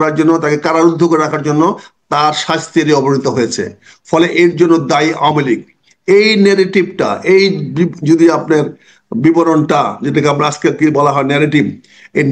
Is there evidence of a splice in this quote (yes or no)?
no